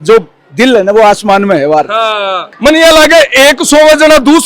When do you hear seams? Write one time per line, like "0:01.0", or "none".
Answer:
0:02.5

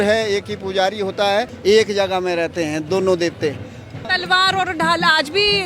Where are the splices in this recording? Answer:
0:01.5
0:04.1

